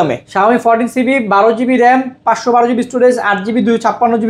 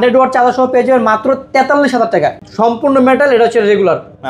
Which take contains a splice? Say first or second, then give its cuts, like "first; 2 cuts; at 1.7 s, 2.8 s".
second; 1 cut; at 2.4 s